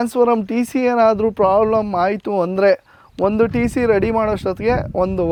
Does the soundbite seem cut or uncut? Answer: uncut